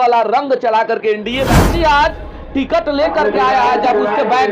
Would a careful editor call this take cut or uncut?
cut